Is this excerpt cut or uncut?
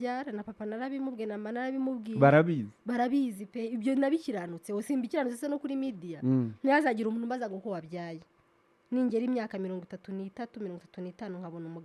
uncut